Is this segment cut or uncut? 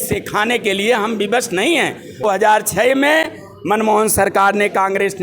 cut